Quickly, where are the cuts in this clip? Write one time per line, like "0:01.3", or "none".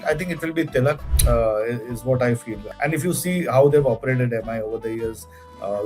0:01.1
0:02.6